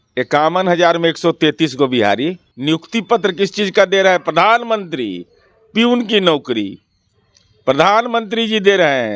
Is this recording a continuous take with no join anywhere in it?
no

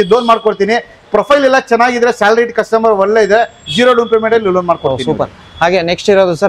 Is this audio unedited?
yes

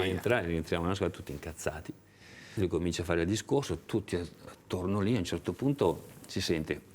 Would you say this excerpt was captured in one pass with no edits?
no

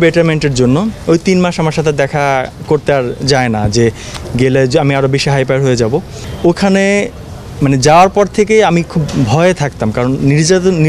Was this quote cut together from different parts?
yes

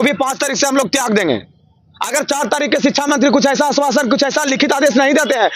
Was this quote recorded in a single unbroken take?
yes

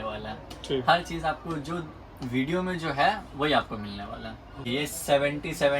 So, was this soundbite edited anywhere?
yes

